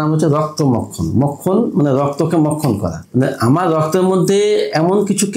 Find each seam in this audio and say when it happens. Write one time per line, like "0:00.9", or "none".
0:03.0